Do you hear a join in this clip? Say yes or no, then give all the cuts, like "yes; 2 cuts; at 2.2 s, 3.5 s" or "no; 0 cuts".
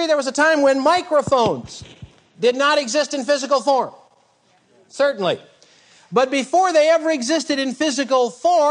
no; 0 cuts